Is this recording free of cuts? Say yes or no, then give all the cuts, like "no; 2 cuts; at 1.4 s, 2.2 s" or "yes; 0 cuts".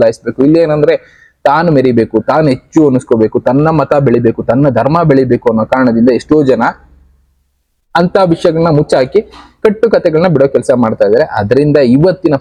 yes; 0 cuts